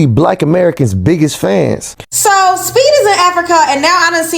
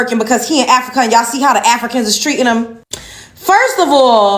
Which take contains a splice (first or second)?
first